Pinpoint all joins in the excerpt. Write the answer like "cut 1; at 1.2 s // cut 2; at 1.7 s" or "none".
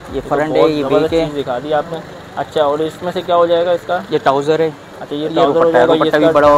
none